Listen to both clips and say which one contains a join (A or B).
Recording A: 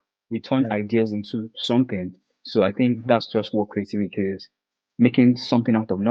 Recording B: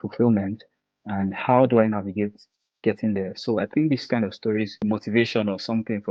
B